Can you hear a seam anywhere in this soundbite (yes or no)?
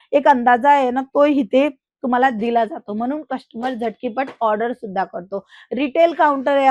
no